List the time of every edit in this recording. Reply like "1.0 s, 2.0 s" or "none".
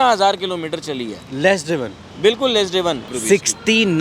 3.1 s